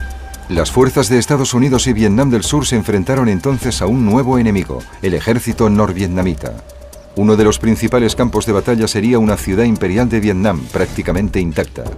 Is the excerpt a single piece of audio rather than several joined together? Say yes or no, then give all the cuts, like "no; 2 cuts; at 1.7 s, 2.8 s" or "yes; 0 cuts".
no; 1 cut; at 3.2 s